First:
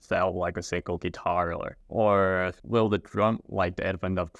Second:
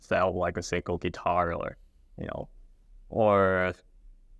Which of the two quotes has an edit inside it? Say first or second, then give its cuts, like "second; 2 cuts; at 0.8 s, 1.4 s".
first; 2 cuts; at 1.8 s, 2.6 s